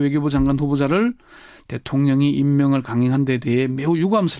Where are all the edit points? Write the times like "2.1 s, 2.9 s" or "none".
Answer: none